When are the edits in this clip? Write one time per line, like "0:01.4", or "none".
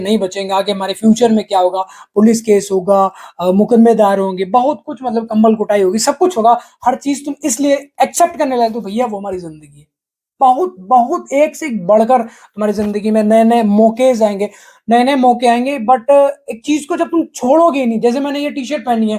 none